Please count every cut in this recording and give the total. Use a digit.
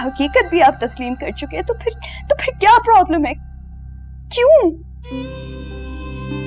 0